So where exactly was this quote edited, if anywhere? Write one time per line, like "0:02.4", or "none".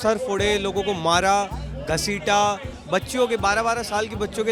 none